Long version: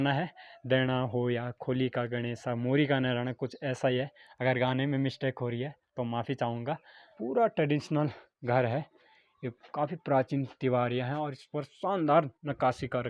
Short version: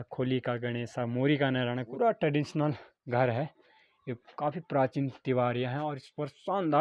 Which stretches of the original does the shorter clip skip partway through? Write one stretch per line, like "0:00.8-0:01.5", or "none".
0:03.4-0:07.2